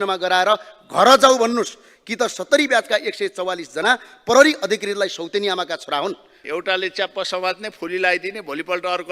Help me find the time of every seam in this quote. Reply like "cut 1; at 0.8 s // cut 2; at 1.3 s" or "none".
cut 1; at 6.4 s